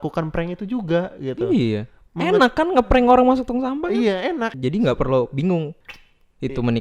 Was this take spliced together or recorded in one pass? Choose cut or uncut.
cut